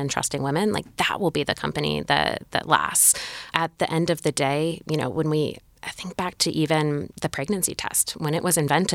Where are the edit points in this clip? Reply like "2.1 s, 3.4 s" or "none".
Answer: 3.6 s